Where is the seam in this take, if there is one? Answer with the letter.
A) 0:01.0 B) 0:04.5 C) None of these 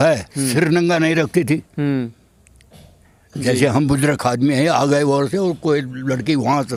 C